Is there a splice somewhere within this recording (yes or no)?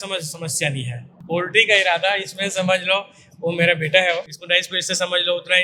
yes